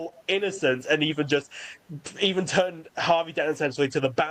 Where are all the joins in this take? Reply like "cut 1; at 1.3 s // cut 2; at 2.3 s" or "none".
none